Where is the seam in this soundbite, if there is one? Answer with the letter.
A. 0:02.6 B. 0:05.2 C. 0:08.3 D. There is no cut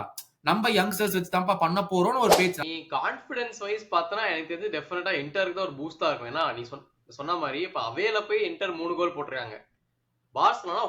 A